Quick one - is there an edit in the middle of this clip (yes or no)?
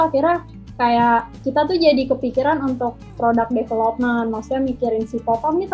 no